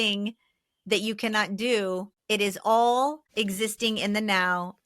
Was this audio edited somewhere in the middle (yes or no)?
yes